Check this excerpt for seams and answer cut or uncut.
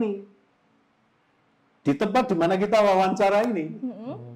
uncut